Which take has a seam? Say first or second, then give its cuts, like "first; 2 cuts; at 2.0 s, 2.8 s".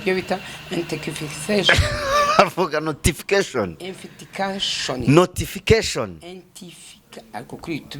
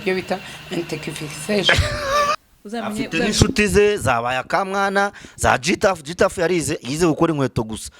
second; 1 cut; at 2.3 s